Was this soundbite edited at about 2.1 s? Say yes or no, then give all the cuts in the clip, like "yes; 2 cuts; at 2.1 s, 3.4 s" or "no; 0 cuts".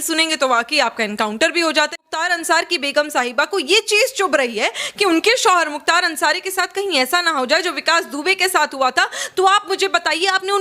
yes; 1 cut; at 2.1 s